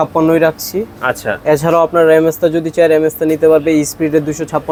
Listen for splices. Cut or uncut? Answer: uncut